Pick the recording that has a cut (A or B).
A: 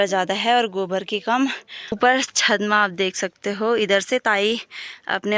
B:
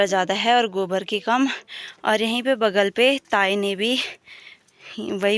A